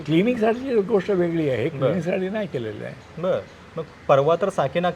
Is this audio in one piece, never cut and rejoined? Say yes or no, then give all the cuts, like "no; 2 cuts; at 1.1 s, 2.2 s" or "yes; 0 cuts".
yes; 0 cuts